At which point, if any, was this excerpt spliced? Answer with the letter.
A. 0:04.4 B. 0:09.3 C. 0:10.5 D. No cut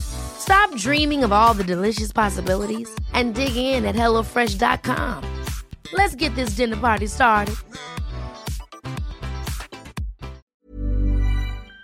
C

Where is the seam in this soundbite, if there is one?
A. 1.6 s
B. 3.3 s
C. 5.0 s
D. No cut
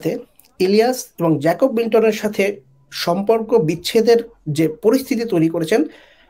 D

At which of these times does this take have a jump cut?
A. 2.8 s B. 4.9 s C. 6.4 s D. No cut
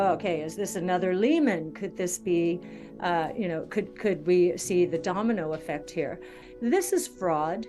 C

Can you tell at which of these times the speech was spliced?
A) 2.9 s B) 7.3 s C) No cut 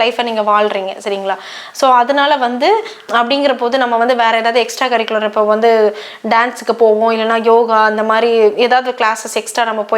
A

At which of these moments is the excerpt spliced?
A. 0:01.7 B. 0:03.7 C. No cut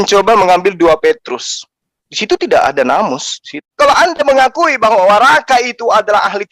B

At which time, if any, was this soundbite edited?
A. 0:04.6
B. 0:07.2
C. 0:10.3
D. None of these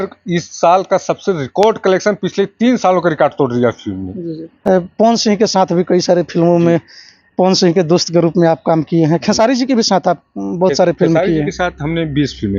A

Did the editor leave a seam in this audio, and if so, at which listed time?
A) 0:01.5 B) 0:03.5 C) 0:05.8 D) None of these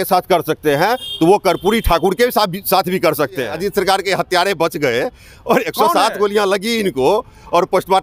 B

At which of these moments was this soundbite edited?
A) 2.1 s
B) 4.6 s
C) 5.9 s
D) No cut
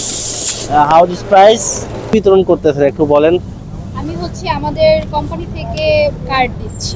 A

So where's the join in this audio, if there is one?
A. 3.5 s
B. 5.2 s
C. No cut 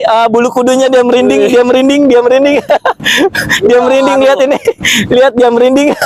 A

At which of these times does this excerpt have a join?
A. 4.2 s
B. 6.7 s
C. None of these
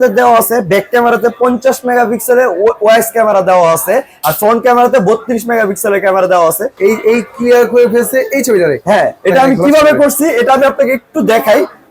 B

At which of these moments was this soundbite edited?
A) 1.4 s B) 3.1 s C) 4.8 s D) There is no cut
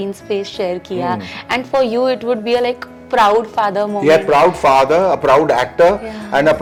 D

